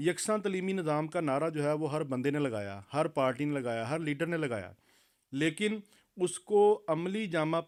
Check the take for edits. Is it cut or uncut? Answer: uncut